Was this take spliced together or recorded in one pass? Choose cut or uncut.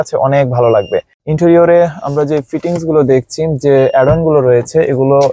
cut